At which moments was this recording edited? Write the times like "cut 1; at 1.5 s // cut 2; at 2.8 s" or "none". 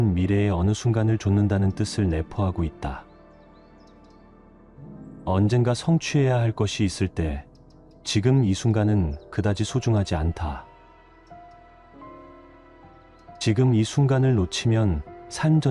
none